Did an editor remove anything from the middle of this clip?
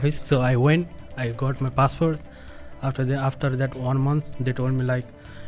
no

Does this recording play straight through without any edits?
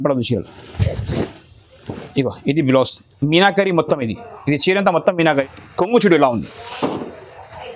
no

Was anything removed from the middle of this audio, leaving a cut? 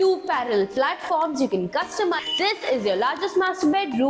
yes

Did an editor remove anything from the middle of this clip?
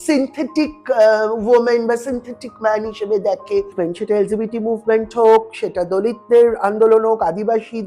yes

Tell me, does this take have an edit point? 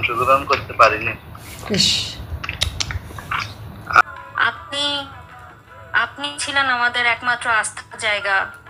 yes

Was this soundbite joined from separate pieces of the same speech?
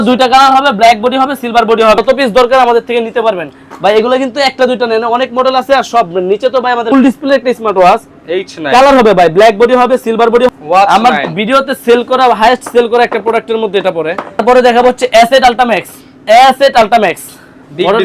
yes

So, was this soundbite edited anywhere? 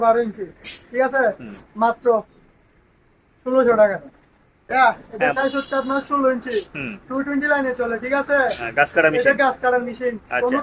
no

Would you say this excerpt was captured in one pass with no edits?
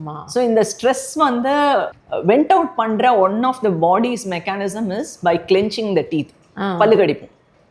no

